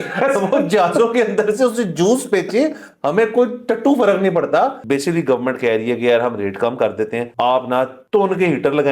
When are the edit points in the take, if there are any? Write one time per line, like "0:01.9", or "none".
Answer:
0:04.8
0:07.3
0:08.0